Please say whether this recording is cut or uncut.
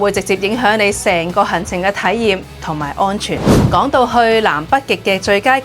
cut